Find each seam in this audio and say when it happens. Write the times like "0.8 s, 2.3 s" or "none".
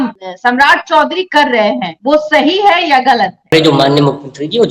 3.5 s